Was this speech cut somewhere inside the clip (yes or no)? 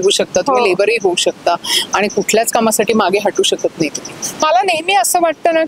yes